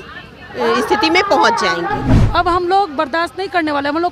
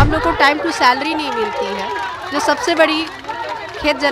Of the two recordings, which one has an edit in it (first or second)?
first